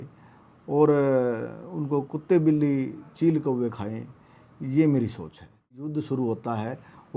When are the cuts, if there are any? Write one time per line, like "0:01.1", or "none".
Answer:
0:05.8